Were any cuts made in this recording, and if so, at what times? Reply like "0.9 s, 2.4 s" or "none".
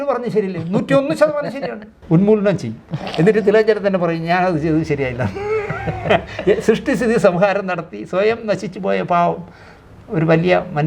1.9 s